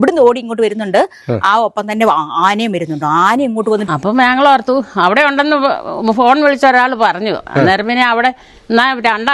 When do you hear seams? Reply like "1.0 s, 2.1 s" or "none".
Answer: 3.9 s